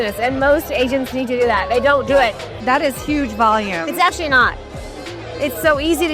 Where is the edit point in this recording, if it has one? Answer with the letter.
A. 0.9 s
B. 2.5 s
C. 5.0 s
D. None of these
B